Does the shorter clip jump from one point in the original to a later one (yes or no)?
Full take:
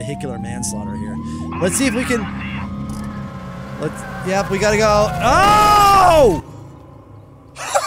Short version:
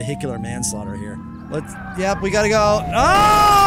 yes